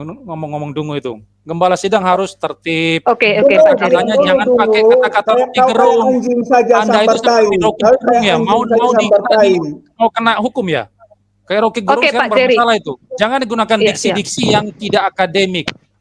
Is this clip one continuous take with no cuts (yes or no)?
yes